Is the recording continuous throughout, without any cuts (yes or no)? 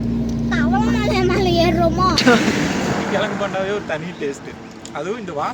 no